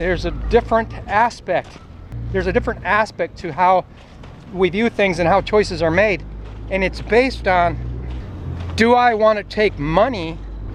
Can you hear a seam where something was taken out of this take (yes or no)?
no